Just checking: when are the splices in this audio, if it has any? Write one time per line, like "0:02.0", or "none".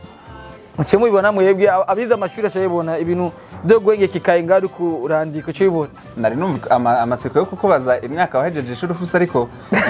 0:06.4